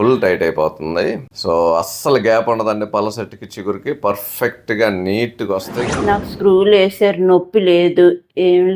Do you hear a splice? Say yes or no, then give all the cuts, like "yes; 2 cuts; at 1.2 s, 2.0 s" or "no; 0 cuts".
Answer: yes; 2 cuts; at 1.3 s, 5.8 s